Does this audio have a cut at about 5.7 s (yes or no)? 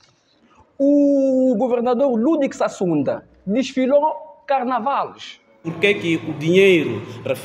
yes